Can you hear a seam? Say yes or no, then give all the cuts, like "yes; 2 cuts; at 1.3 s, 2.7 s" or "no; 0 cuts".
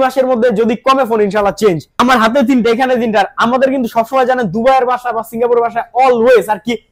yes; 1 cut; at 1.9 s